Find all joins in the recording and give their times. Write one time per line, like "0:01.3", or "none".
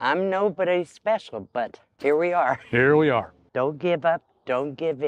0:01.8
0:03.4

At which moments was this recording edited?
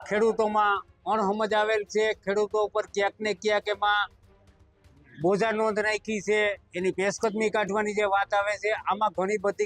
none

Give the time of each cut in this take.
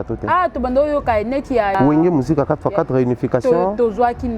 0:01.7

